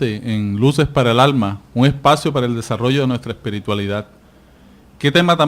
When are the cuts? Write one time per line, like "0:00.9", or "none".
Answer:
0:02.4